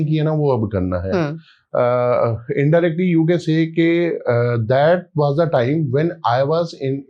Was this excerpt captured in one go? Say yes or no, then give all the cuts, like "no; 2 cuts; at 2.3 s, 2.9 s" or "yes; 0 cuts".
yes; 0 cuts